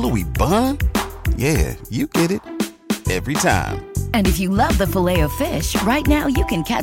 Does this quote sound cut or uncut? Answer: uncut